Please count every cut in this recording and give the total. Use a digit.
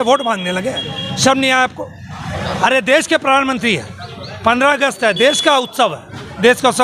1